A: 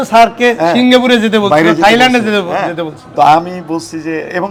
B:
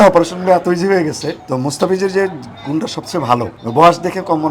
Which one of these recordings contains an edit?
B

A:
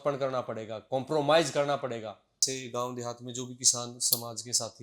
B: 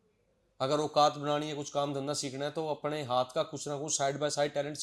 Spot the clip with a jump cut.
A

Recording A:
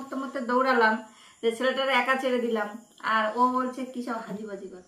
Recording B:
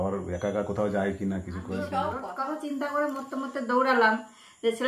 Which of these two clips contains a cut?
B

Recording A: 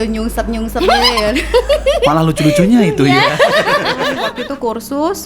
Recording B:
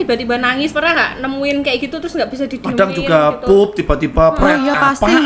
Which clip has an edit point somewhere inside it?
A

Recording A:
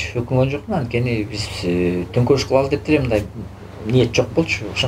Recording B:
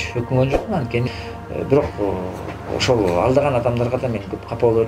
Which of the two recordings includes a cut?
B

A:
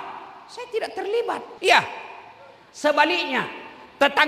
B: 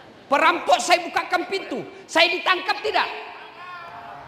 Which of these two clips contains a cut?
A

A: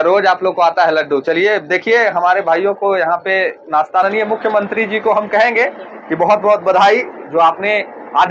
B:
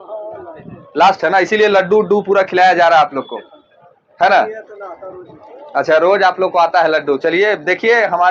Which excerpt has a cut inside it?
A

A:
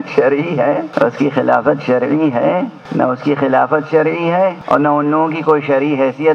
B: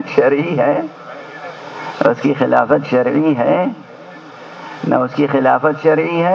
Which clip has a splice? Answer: A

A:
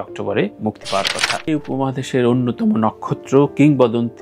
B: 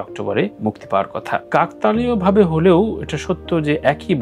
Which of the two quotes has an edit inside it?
A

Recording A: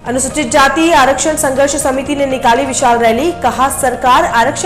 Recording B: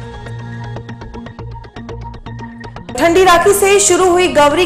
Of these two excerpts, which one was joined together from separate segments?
B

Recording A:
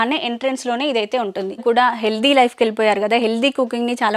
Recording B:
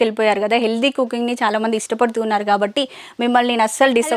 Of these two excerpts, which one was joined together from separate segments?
A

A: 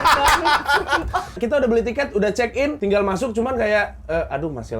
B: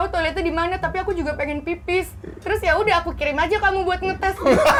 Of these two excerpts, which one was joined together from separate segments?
A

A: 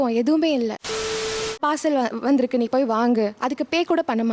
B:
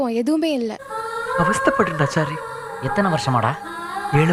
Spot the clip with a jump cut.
A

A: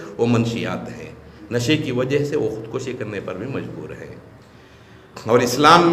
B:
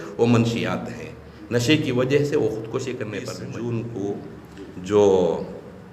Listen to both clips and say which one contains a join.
B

